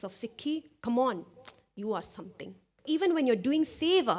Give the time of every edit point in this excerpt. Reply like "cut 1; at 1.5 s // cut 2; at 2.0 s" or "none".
cut 1; at 2.8 s